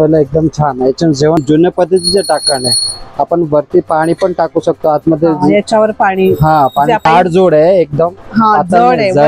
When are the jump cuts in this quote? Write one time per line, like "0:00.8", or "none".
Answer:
0:01.4
0:07.0